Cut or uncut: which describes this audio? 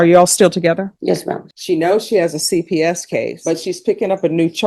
cut